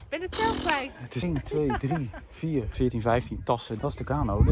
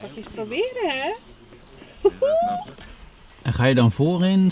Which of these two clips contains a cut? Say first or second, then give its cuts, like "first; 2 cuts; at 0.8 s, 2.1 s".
first; 3 cuts; at 1.2 s, 2.7 s, 3.7 s